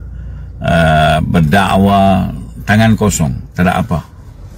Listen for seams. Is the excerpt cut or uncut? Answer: uncut